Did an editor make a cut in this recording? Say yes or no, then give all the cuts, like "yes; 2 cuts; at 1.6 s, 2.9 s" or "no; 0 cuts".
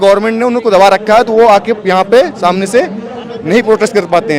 no; 0 cuts